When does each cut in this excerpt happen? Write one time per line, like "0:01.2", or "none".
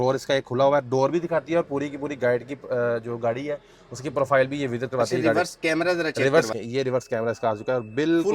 0:06.5

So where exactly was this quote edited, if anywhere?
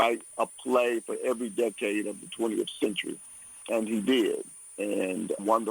0:03.6

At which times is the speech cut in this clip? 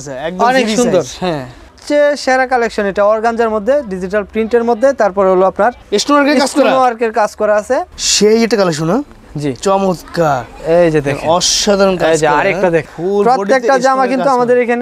0:01.7
0:08.0
0:12.9

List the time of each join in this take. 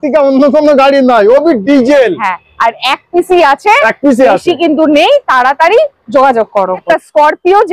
0:06.8

